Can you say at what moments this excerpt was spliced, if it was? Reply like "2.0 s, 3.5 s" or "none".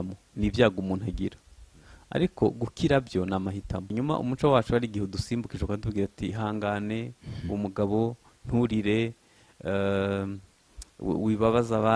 3.9 s